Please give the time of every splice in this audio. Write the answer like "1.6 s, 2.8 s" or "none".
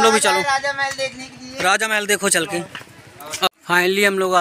3.5 s